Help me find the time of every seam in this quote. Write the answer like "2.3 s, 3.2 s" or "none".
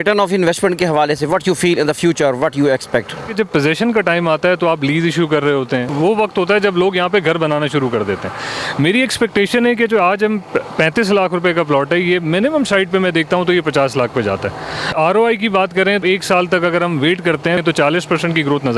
3.3 s, 5.9 s, 14.9 s, 16.0 s, 17.6 s